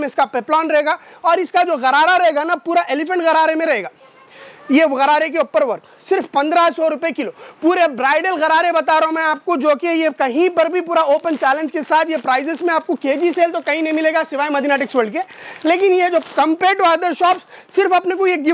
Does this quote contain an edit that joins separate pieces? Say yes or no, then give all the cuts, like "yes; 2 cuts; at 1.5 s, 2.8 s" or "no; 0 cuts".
no; 0 cuts